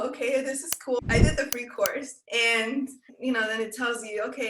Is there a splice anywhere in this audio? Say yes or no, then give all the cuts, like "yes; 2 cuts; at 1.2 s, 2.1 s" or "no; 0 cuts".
yes; 2 cuts; at 1.0 s, 2.2 s